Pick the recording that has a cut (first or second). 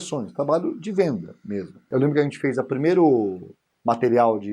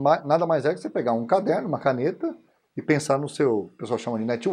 first